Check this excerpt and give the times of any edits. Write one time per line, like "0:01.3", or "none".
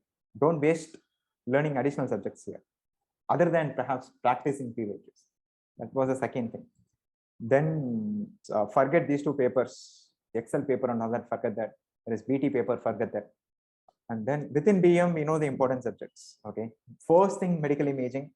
0:08.3
0:10.2